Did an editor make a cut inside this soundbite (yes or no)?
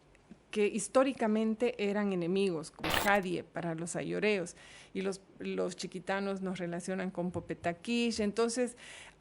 yes